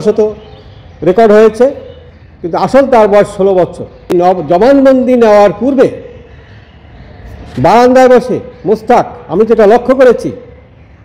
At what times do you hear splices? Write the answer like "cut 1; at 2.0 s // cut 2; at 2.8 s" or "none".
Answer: cut 1; at 4.1 s